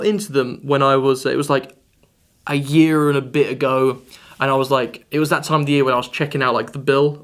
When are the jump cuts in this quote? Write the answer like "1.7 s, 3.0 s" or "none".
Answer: 3.6 s